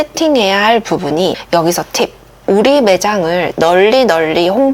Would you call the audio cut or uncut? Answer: cut